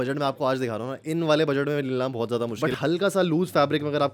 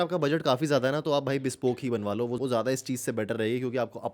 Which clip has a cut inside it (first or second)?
first